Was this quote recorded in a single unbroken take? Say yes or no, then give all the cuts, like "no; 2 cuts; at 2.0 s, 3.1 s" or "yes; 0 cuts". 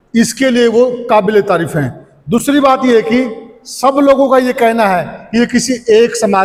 yes; 0 cuts